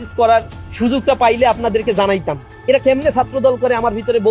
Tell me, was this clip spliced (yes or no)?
no